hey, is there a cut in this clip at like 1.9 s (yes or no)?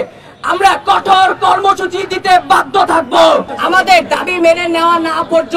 no